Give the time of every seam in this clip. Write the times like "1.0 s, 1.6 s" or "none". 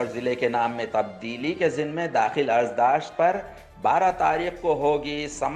none

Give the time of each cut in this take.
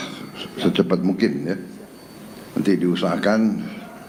none

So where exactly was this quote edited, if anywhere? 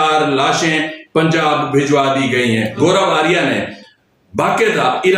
2.7 s

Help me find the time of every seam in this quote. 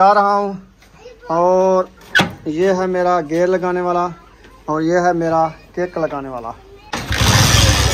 6.7 s

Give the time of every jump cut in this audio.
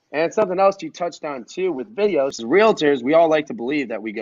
2.4 s

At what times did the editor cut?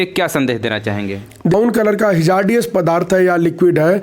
1.5 s

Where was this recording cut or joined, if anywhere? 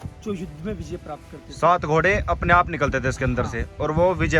none

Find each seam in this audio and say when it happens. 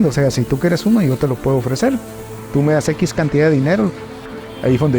4.0 s

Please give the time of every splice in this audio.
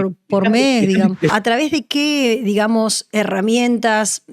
1.3 s

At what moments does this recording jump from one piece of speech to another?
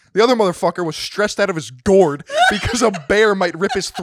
none

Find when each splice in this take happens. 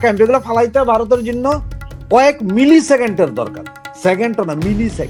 none

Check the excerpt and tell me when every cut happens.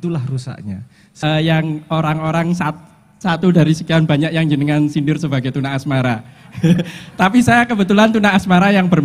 1.1 s

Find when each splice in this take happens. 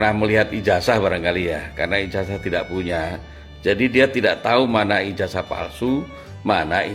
none

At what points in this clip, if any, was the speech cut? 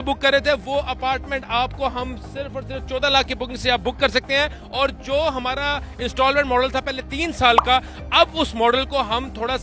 none

